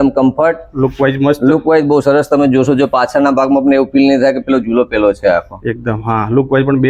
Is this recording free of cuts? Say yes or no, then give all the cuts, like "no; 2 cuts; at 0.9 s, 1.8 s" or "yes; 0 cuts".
yes; 0 cuts